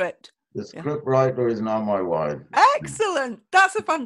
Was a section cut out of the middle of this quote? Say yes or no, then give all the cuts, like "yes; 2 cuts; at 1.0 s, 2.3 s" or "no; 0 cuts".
no; 0 cuts